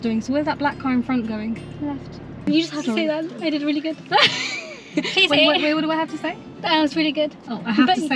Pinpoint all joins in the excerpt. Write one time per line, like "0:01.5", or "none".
0:02.4